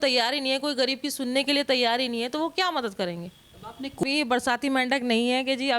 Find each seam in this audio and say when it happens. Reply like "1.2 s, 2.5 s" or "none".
4.0 s